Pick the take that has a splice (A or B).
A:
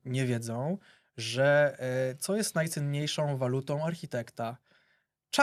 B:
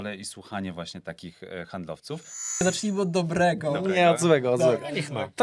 B